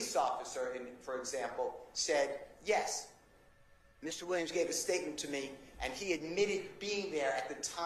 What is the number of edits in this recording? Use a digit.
0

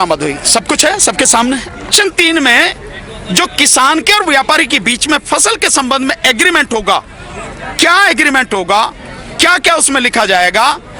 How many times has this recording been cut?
1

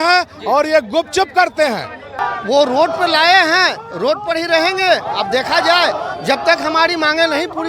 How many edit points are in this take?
1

